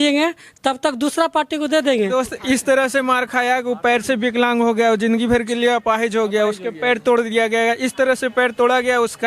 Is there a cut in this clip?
yes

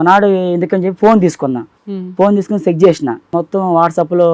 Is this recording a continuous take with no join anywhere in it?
no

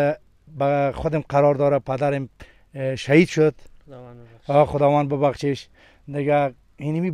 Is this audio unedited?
yes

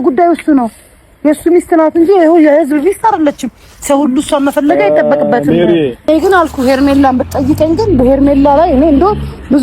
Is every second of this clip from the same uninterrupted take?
no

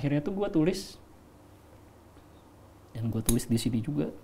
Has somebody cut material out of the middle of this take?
no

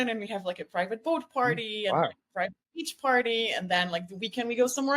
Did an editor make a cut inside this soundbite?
no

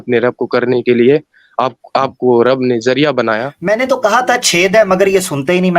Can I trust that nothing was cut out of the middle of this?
no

